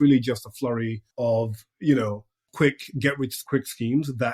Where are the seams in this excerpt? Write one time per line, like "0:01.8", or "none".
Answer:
0:01.0
0:02.4
0:03.4